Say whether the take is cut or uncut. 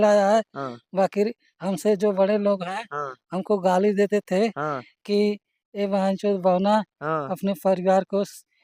uncut